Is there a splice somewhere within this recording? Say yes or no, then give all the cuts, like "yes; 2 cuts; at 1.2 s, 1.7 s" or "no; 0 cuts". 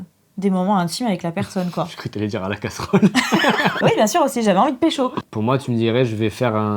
yes; 2 cuts; at 3.8 s, 5.3 s